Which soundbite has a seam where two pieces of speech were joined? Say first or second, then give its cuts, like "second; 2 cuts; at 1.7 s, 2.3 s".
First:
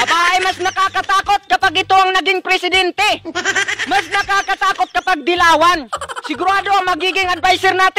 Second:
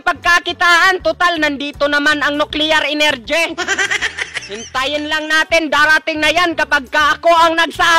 first; 1 cut; at 3.3 s